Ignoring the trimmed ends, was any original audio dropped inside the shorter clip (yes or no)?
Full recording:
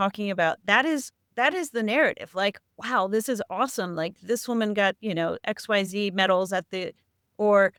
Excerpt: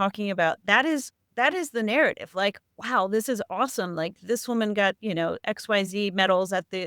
no